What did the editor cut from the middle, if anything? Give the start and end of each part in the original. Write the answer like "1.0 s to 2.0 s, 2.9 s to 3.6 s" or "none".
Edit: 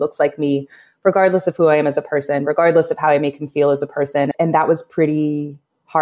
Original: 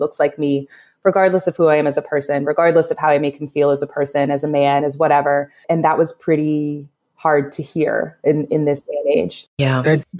4.3 s to 5.6 s